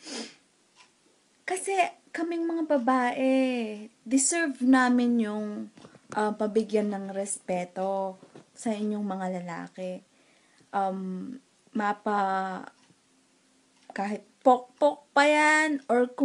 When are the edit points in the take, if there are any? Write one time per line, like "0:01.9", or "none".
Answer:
0:04.9